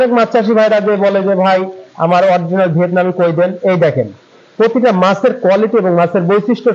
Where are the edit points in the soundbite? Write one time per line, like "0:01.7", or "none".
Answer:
none